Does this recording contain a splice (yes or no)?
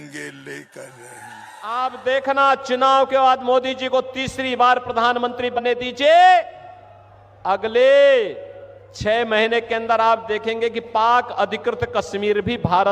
yes